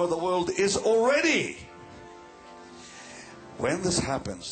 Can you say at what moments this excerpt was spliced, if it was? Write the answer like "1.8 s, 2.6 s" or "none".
2.9 s

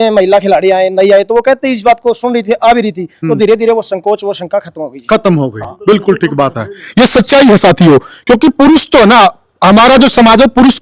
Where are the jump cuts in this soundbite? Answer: none

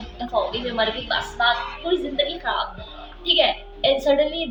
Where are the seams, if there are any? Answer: none

